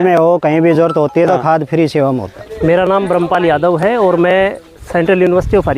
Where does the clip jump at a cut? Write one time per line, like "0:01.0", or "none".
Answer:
0:02.3